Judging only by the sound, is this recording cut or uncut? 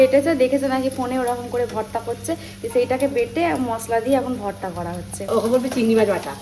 cut